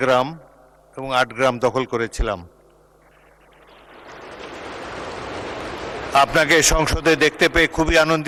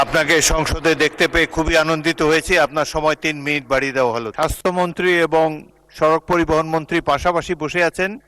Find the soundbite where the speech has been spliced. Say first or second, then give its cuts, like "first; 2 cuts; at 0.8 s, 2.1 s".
second; 1 cut; at 4.3 s